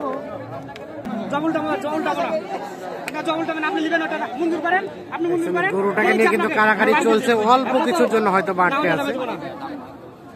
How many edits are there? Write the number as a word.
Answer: one